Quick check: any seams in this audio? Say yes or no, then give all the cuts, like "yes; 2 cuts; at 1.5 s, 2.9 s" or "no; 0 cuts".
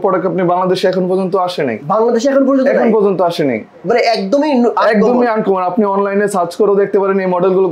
no; 0 cuts